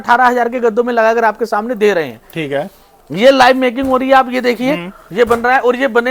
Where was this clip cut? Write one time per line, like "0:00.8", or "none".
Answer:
none